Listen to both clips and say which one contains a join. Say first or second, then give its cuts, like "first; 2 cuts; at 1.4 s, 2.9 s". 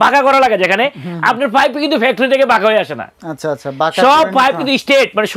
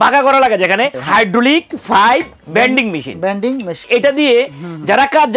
second; 2 cuts; at 1.0 s, 3.8 s